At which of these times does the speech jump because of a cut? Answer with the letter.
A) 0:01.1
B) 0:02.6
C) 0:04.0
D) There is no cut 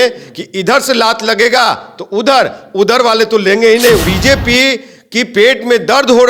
C